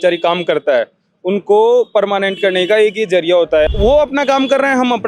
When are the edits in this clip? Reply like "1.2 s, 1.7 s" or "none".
3.7 s